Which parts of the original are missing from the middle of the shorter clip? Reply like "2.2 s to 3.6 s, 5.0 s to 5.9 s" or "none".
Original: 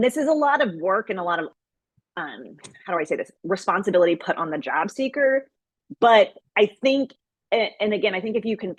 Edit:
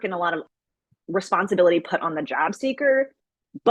2.0 s to 3.3 s